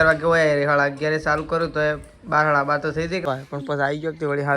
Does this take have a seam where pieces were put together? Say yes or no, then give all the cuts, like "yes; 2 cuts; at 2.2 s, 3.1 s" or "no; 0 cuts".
yes; 1 cut; at 3.2 s